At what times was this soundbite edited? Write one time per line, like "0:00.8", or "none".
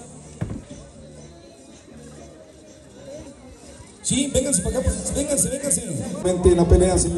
0:06.2